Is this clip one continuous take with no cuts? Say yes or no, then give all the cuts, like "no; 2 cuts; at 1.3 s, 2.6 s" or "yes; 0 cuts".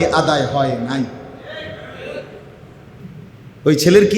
no; 1 cut; at 2.9 s